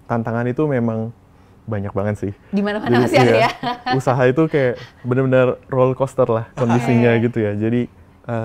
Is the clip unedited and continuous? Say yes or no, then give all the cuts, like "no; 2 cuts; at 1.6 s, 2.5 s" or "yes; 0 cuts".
yes; 0 cuts